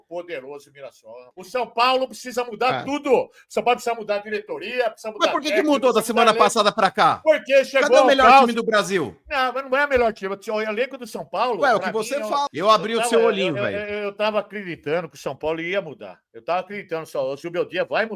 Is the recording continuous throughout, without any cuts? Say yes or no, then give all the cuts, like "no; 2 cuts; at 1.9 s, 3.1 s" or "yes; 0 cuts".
no; 2 cuts; at 1.1 s, 12.5 s